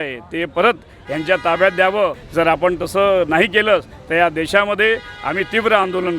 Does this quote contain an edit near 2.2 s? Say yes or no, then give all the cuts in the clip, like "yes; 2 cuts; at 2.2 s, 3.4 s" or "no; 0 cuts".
yes; 1 cut; at 2.2 s